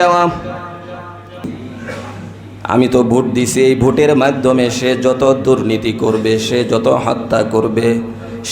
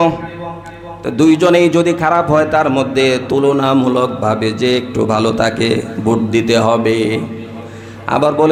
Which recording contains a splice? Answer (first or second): first